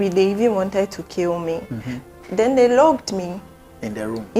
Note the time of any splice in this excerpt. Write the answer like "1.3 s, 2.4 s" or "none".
2.1 s